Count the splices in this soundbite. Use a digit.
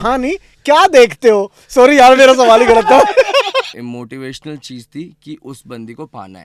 1